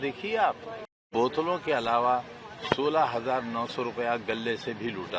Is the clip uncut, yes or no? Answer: no